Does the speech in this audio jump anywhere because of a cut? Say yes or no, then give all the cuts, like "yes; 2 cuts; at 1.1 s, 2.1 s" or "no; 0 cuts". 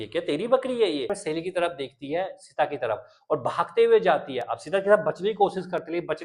yes; 1 cut; at 1.2 s